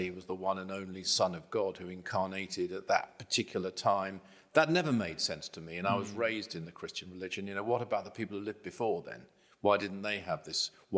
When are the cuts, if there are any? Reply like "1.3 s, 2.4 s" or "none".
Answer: none